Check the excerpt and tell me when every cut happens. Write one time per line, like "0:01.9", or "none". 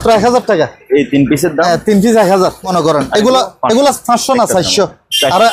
0:02.6